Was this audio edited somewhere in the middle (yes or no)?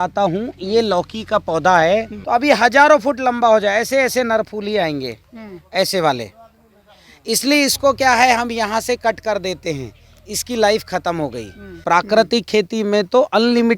yes